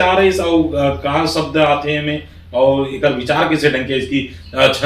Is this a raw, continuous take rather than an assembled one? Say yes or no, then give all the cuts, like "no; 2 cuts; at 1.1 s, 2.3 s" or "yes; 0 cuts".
yes; 0 cuts